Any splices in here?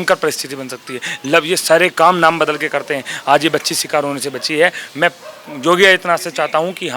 no; 0 cuts

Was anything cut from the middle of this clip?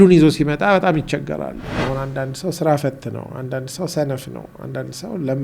yes; 1 cut; at 1.6 s

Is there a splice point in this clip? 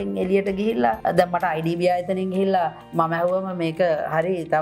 yes; 1 cut; at 1.0 s

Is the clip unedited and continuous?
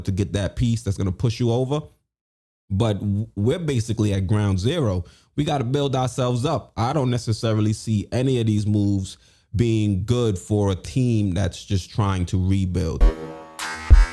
no; 1 cut; at 13.0 s

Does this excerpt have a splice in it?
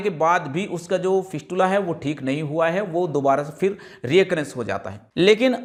no; 0 cuts

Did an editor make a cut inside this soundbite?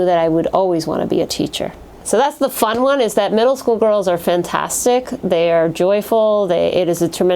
yes; 1 cut; at 1.9 s

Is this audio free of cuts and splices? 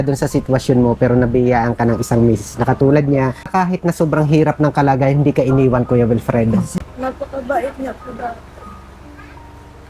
no; 2 cuts; at 3.5 s, 6.8 s

